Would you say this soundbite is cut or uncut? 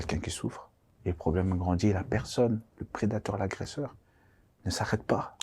cut